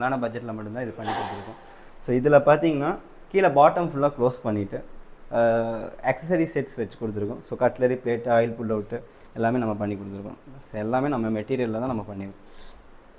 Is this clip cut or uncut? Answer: uncut